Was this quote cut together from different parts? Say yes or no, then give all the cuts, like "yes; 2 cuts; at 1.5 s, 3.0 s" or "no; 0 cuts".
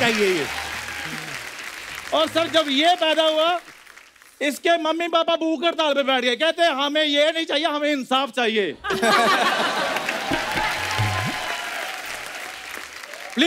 no; 0 cuts